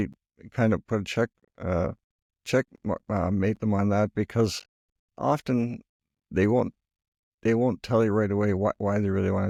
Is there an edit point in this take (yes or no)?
no